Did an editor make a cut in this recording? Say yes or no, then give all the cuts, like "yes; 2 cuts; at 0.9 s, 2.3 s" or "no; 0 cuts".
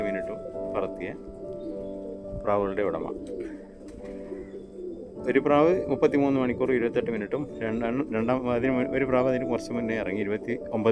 no; 0 cuts